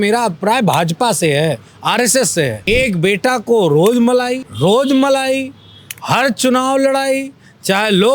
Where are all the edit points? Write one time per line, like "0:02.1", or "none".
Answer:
0:02.6
0:04.4